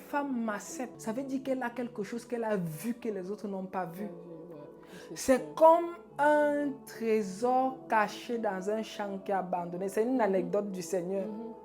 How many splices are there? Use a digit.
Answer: 1